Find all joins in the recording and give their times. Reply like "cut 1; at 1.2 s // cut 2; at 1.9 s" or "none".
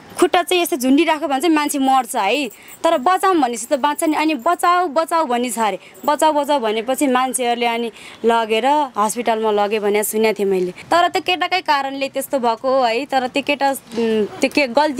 cut 1; at 10.8 s